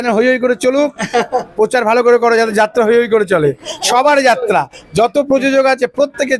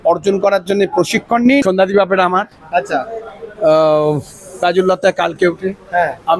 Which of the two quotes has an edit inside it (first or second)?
second